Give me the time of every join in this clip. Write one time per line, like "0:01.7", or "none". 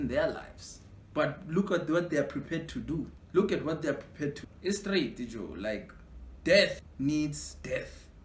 0:03.2
0:04.4
0:06.8